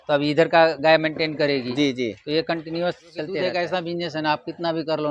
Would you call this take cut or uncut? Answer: cut